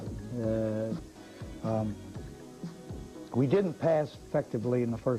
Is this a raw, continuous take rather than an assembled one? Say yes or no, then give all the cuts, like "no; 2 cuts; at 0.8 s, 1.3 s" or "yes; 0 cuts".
yes; 0 cuts